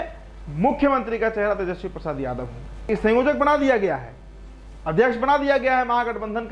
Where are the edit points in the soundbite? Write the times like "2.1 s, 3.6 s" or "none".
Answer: 2.9 s